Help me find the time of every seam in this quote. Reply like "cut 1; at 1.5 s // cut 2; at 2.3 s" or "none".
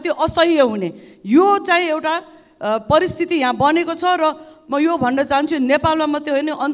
none

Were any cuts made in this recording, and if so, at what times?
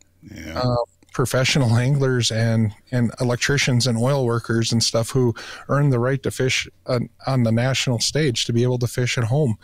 none

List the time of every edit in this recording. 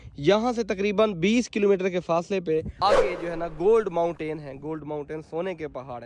cut 1; at 2.8 s

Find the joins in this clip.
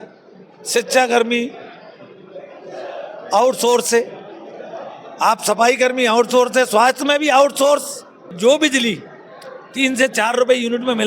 cut 1; at 8.3 s

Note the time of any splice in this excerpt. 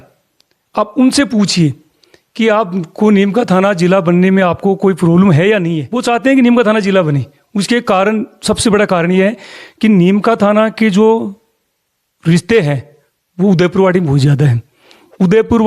cut 1; at 5.9 s

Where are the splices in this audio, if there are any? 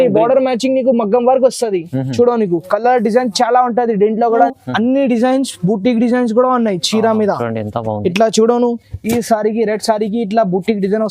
cut 1; at 4.5 s

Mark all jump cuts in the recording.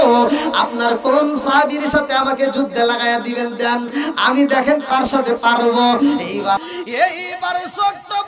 cut 1; at 6.6 s

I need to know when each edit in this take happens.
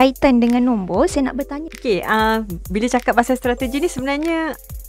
cut 1; at 1.6 s

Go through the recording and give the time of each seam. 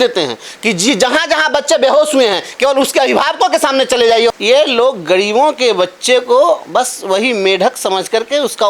cut 1; at 4.3 s

